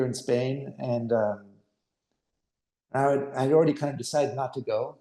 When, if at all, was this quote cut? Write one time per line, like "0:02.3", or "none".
none